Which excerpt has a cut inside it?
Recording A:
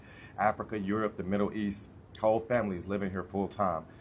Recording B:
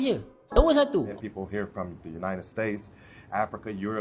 B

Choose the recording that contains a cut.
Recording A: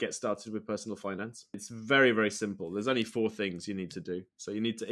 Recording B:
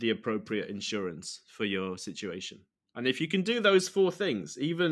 A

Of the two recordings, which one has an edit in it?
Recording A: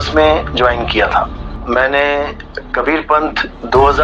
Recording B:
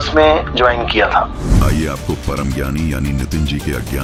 A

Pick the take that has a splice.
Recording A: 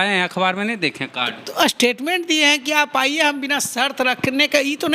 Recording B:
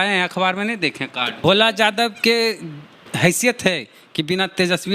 B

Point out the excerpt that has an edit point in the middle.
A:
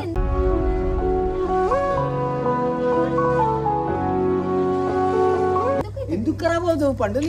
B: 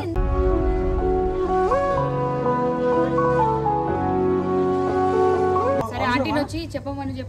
B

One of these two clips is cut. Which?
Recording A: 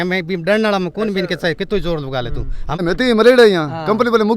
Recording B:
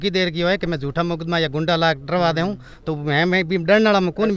A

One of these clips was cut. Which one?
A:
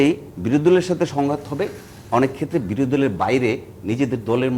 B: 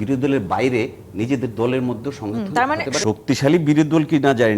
B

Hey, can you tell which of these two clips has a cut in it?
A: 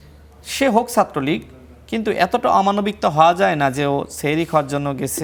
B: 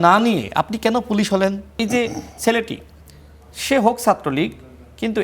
B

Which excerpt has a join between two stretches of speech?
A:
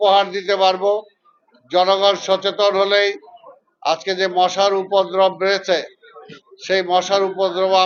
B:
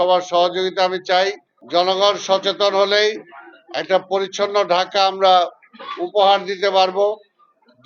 B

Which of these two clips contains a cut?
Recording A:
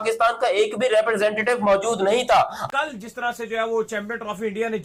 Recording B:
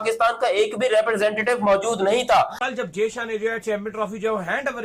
B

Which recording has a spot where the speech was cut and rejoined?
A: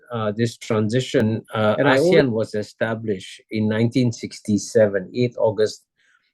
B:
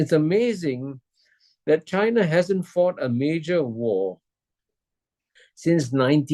A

